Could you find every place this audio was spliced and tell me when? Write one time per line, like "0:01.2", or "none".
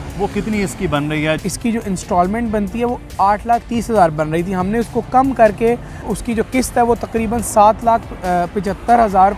0:01.4
0:06.1